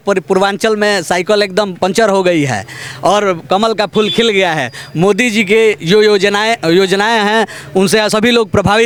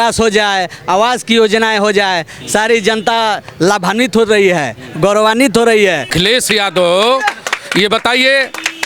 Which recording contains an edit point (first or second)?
second